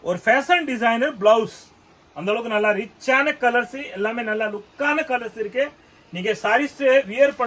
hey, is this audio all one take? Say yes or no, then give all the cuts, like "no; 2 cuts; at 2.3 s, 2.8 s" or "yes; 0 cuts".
yes; 0 cuts